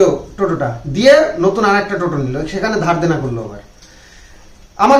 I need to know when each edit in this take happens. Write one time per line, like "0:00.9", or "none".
none